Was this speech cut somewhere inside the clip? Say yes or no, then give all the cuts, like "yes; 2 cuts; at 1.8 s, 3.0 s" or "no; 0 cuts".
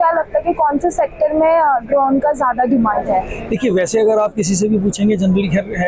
no; 0 cuts